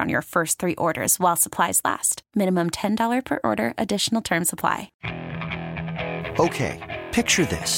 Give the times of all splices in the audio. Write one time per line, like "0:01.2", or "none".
0:05.0

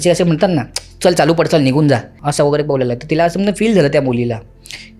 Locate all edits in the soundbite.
0:02.2

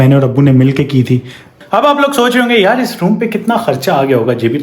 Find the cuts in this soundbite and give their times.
0:01.5

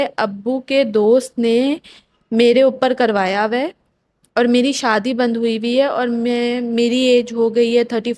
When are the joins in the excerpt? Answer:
none

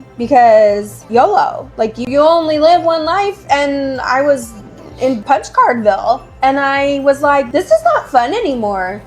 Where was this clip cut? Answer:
0:00.9
0:02.0
0:05.2
0:07.5

